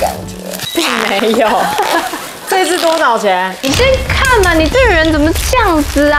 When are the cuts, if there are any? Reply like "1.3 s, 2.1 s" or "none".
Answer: none